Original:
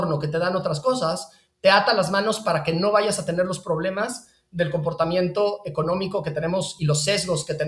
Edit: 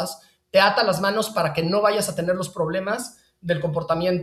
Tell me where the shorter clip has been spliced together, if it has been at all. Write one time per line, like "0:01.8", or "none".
none